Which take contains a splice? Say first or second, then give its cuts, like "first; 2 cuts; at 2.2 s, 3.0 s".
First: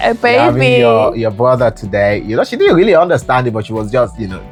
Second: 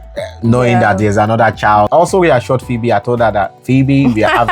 second; 1 cut; at 1.9 s